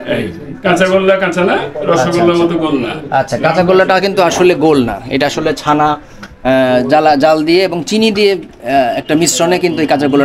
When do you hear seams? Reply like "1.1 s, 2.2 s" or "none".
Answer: none